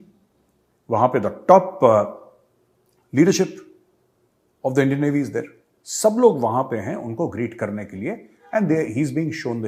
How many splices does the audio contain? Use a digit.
0